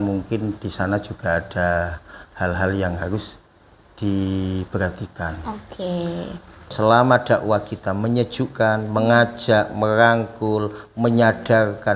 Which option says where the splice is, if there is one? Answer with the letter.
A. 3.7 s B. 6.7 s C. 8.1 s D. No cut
B